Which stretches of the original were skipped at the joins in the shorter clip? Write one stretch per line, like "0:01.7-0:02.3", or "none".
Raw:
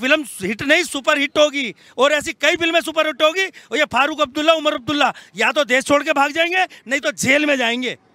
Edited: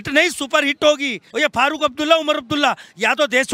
0:01.7-0:03.6

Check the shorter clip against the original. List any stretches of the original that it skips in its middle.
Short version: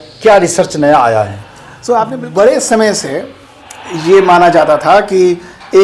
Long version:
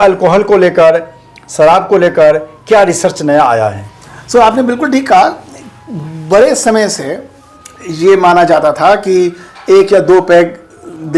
0:04.6-0:06.1

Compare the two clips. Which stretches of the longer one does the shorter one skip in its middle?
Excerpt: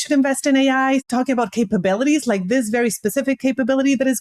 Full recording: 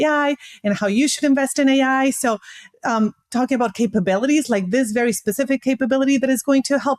0:02.2-0:03.3

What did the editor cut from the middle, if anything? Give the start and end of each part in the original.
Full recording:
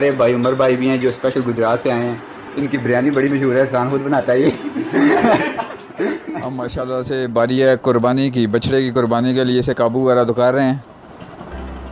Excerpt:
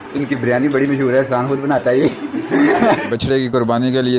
0:05.5-0:08.5

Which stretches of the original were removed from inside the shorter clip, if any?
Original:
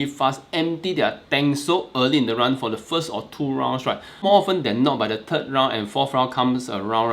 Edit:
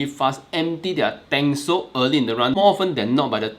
0:02.5-0:04.2

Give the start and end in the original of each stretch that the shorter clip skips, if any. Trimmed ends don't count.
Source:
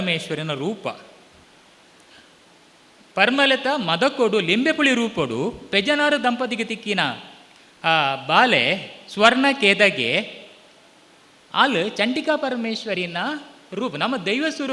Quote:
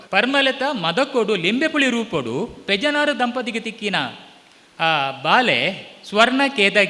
none

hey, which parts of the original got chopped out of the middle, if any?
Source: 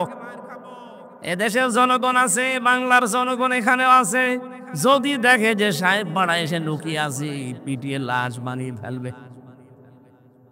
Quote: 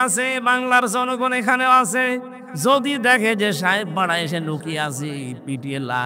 none

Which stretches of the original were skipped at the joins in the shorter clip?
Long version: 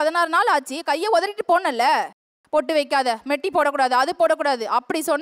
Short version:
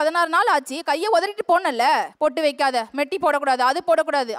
0:02.1-0:02.4

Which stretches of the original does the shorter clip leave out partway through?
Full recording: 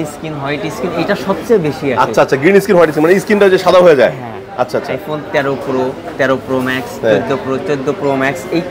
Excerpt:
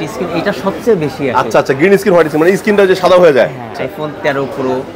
0:04.4-0:04.9

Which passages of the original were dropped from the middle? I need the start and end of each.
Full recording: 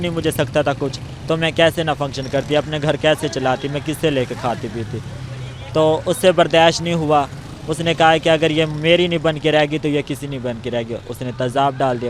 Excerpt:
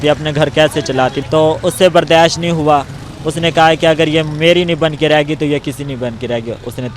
0:03.7-0:05.6

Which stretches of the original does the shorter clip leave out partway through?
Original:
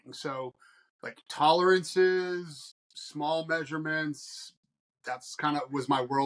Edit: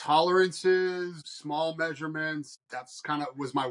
0:02.6-0:03.0
0:04.3-0:04.9

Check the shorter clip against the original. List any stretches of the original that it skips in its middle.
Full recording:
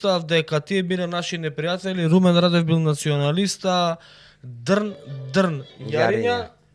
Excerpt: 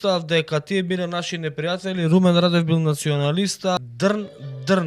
0:03.8-0:04.4

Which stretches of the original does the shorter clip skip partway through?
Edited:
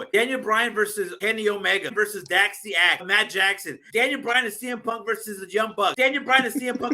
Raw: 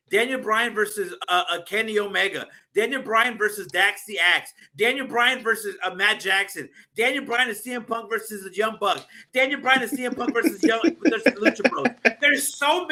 0:01.1-0:01.6
0:02.4-0:03.3
0:04.8-0:06.4
0:09.0-0:09.3

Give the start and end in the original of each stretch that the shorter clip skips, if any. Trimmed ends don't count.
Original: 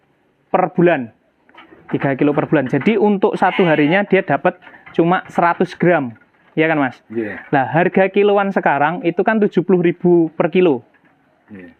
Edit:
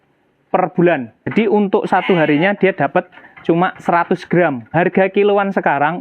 0:01.3-0:02.8
0:06.2-0:07.7

